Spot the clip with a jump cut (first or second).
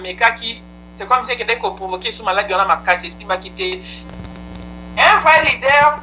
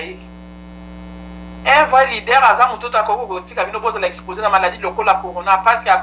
first